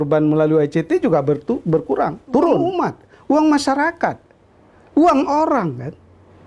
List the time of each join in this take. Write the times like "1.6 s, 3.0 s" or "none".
2.7 s